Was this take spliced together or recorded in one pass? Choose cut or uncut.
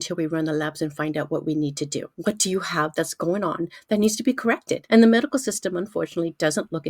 cut